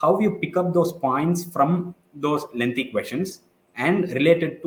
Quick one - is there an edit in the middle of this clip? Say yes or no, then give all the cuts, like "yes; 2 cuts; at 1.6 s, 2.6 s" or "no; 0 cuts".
no; 0 cuts